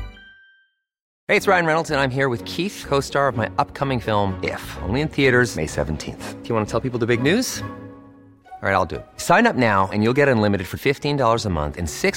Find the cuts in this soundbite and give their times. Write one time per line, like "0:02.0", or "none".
0:01.1